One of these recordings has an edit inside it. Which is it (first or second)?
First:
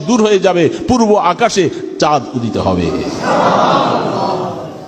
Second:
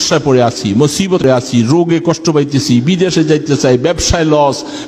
second